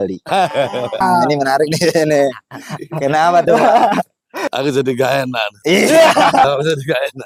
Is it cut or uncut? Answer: uncut